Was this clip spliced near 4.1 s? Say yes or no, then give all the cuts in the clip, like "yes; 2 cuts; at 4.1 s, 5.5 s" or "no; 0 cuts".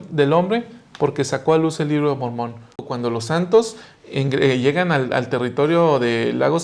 no; 1 cut; at 2.9 s